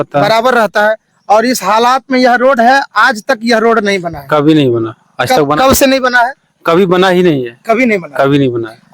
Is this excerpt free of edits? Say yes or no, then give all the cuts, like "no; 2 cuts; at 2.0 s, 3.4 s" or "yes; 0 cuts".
yes; 0 cuts